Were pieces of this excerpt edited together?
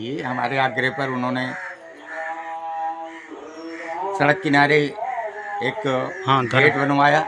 no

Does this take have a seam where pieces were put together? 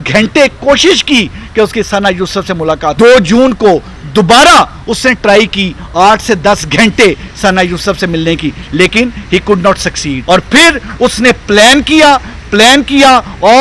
yes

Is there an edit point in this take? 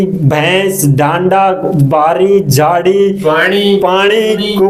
no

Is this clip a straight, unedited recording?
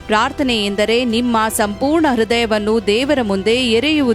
yes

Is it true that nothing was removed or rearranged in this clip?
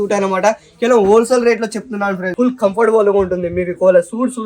no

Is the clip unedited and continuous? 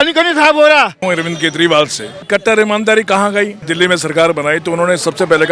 no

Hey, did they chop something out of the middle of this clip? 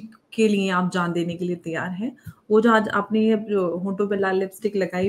no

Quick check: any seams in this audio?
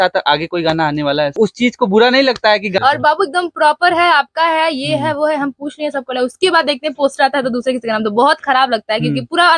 yes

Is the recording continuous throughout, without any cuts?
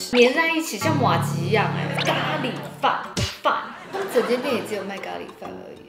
no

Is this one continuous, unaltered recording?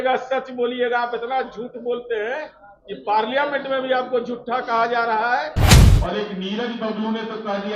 no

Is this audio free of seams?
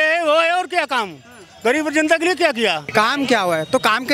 no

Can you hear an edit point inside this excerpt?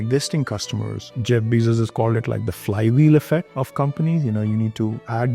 yes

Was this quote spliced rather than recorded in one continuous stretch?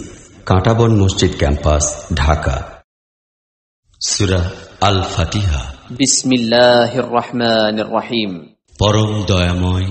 no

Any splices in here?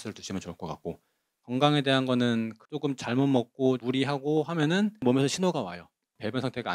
yes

